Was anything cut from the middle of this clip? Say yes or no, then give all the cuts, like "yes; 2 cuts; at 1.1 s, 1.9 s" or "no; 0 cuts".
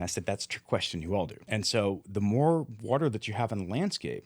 yes; 1 cut; at 1.4 s